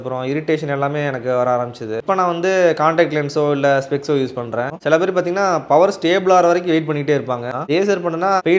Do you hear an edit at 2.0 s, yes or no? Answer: yes